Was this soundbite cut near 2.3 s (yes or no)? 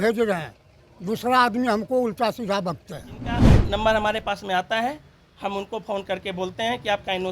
no